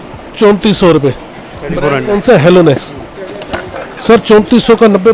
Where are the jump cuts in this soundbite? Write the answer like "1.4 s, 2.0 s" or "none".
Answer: none